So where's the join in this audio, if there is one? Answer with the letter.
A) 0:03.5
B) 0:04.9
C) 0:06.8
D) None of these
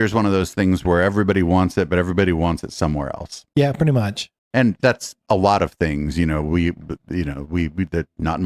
D